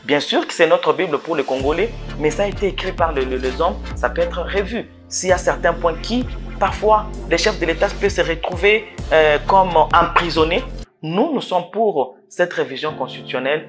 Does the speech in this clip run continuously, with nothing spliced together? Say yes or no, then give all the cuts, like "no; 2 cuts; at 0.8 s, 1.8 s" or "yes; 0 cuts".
no; 1 cut; at 10.8 s